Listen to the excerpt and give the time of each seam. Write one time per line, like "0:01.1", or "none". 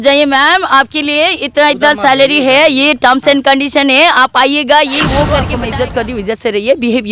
0:05.5